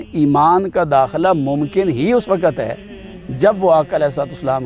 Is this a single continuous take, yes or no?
yes